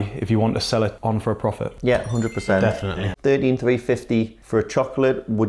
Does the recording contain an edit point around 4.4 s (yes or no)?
no